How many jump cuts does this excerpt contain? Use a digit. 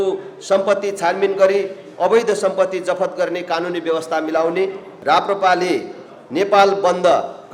1